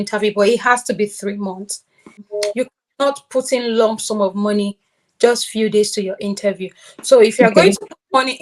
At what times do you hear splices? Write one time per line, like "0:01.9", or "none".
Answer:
0:02.1

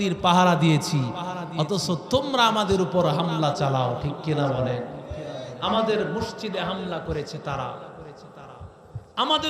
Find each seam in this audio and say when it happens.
none

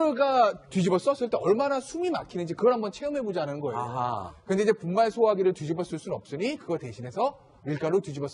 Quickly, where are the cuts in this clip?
0:03.9

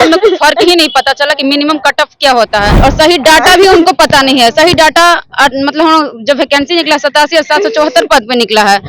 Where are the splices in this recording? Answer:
0:02.7

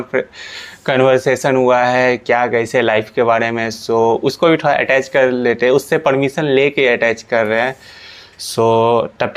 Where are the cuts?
none

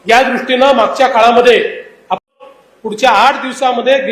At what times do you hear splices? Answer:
0:02.2

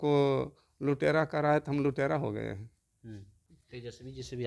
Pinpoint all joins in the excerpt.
0:03.5

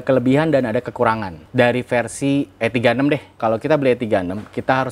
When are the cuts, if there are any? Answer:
0:01.3
0:03.4

